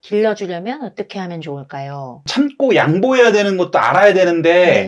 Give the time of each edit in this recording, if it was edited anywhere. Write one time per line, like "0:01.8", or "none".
0:02.3